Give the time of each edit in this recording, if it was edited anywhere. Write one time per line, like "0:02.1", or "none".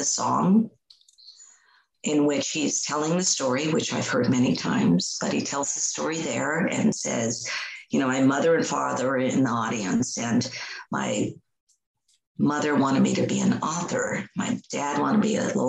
none